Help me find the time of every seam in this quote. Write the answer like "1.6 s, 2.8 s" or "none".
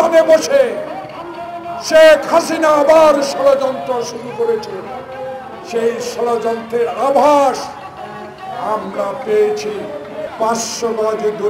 10.3 s